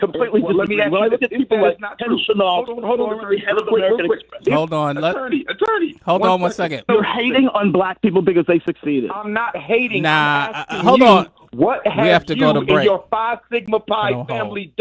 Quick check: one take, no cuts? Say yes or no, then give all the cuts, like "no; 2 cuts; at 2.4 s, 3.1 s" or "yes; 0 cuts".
no; 1 cut; at 6.8 s